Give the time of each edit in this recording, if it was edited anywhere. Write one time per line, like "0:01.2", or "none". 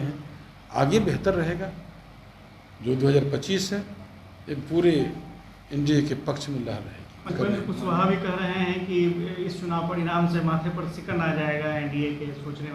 0:07.3